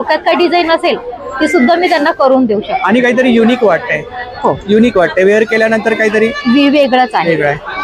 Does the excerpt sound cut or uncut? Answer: uncut